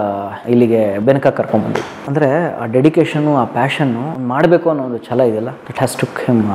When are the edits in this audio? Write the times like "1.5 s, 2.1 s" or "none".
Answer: 2.0 s, 4.1 s, 5.6 s